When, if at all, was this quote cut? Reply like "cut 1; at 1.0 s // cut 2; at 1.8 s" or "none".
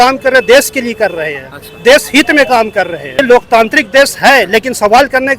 cut 1; at 3.2 s